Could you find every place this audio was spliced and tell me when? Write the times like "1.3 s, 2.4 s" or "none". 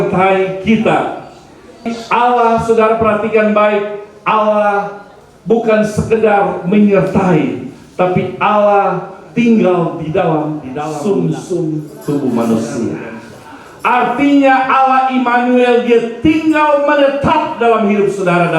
1.9 s, 11.9 s